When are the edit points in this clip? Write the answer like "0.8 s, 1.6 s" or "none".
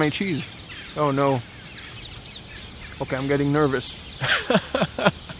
none